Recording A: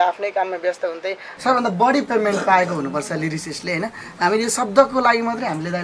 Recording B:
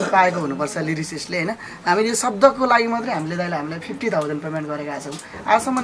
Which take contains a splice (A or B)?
A